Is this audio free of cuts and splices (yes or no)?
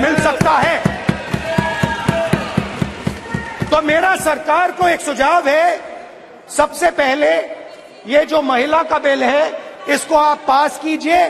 yes